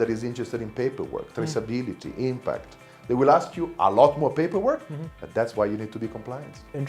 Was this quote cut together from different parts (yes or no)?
no